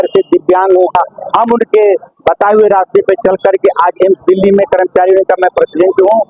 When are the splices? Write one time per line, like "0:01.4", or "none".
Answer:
0:00.9